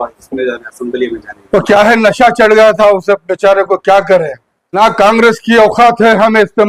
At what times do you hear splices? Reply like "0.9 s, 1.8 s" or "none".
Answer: 4.8 s